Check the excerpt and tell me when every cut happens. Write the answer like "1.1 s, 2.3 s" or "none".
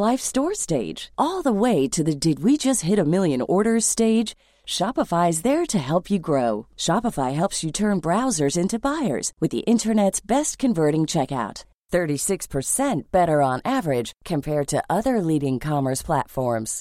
none